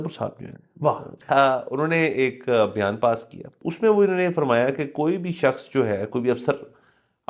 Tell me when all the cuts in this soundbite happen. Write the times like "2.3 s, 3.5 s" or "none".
1.1 s, 3.6 s